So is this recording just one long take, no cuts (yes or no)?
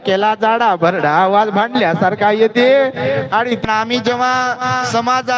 no